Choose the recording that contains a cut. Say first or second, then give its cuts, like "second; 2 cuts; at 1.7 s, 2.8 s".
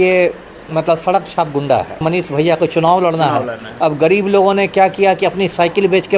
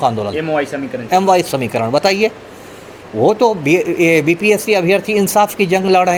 first; 1 cut; at 2.0 s